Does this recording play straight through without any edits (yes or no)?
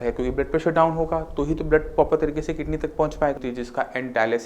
no